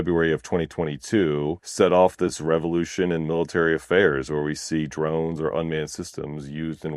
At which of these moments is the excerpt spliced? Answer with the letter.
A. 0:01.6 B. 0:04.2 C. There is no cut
A